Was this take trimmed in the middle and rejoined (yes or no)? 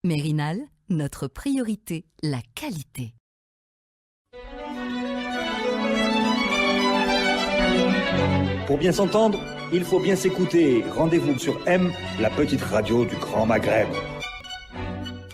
yes